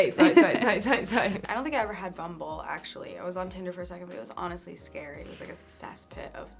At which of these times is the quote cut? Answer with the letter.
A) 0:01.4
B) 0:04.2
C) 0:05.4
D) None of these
A